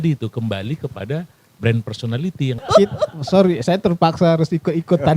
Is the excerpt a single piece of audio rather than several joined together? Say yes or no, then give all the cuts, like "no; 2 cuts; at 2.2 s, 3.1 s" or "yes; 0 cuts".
no; 1 cut; at 2.7 s